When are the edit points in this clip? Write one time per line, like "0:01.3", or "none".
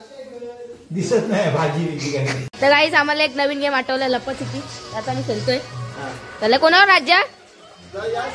0:02.5